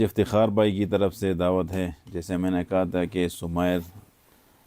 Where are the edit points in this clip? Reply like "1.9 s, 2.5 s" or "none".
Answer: none